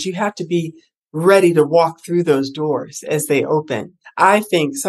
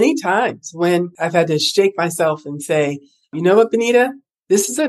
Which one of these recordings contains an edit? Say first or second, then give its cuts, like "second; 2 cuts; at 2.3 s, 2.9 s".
second; 1 cut; at 1.2 s